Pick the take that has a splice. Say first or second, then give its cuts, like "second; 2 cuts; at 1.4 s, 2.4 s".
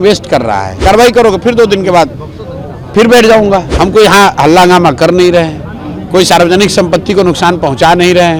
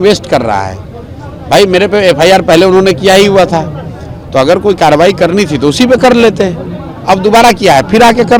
first; 2 cuts; at 0.8 s, 3.7 s